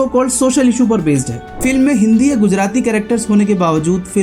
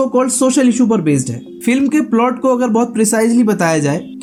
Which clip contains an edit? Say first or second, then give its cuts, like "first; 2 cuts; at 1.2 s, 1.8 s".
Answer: first; 1 cut; at 1.5 s